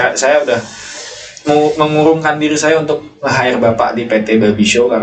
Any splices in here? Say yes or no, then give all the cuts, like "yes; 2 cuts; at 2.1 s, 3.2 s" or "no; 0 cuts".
no; 0 cuts